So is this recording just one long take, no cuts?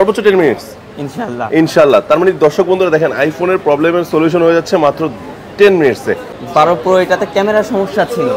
no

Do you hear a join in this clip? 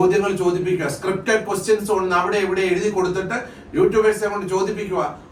no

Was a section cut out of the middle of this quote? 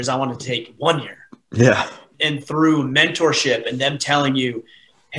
no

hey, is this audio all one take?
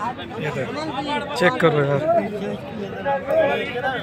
yes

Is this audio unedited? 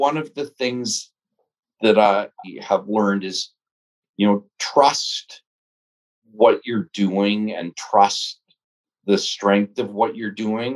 no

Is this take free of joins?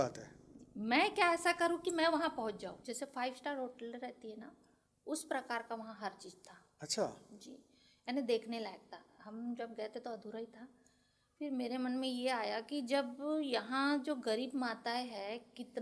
no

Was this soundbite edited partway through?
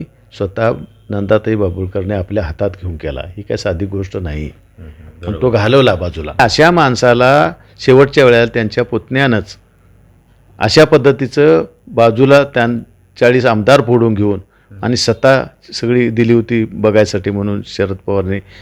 yes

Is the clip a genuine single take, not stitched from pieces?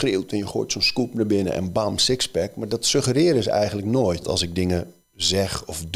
no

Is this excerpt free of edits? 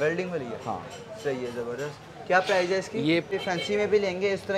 no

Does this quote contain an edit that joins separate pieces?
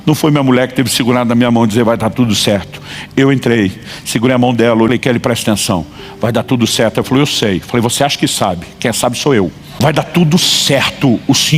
yes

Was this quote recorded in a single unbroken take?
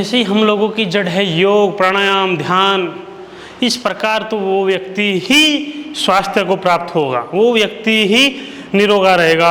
yes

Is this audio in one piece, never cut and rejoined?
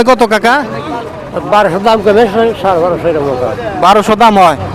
yes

